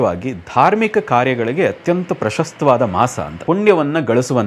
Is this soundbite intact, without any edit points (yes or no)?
no